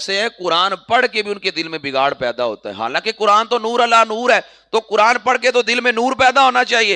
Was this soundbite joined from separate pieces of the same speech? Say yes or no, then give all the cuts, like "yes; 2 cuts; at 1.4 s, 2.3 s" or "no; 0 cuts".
no; 0 cuts